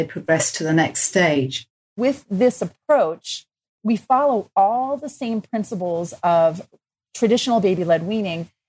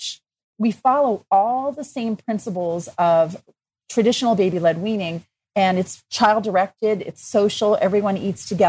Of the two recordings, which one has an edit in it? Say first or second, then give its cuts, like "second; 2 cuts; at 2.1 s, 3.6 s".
first; 1 cut; at 2.0 s